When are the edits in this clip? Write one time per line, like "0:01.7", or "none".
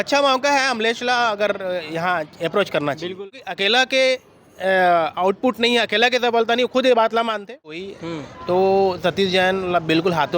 0:03.1
0:07.9